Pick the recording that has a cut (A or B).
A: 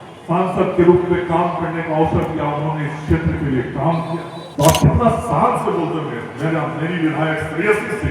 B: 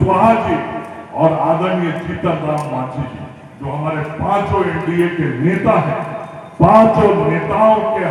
A